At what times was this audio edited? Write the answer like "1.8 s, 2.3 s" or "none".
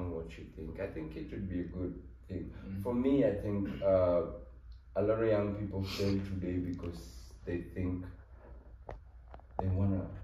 none